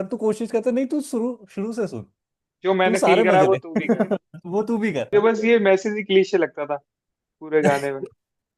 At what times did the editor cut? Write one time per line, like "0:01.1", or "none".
0:05.1